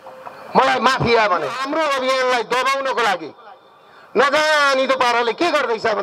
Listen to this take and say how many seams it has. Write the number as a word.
one